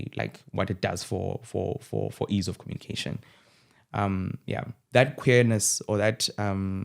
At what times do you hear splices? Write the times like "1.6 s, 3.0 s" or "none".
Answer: 4.7 s

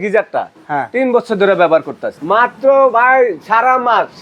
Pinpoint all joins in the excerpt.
2.2 s

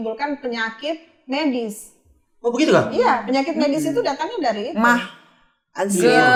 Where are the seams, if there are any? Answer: none

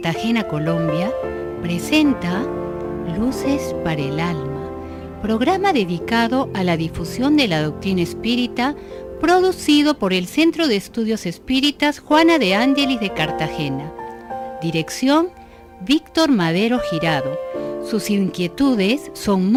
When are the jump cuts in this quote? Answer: none

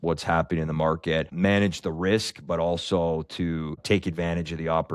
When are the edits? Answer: 1.3 s, 3.8 s

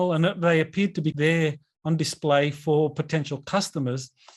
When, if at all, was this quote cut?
1.2 s

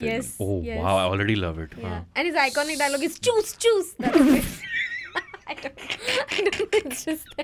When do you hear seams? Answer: none

